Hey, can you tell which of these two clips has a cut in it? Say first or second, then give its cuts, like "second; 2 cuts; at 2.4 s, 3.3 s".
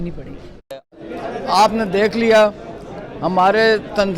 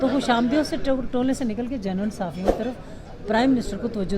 first; 1 cut; at 0.9 s